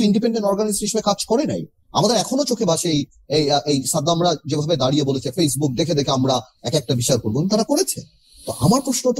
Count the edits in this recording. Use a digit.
0